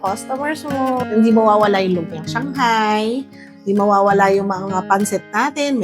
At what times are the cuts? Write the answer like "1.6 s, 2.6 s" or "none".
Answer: 1.0 s